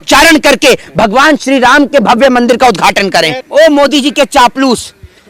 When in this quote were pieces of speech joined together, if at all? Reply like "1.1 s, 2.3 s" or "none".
3.4 s